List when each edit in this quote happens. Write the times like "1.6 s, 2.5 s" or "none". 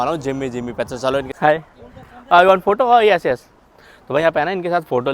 1.3 s

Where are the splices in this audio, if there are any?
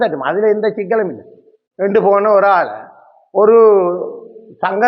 none

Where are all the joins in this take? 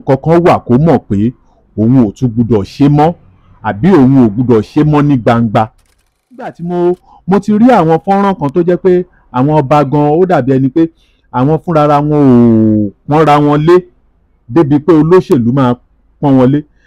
6.6 s

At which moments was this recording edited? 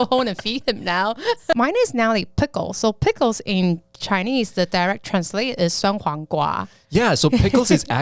1.5 s

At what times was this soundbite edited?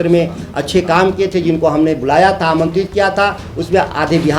none

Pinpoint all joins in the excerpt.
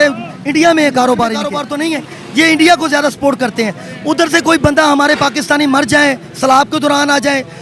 1.7 s

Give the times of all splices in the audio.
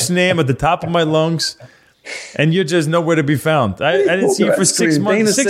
none

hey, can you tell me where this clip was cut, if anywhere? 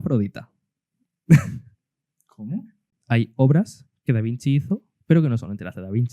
2.9 s, 4.9 s

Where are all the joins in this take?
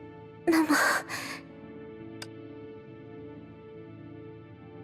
none

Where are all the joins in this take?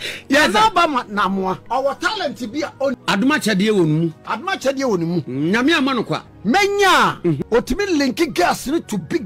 1.6 s, 3.0 s, 6.3 s, 7.4 s

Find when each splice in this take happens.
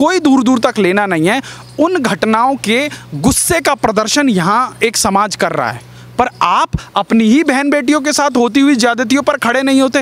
none

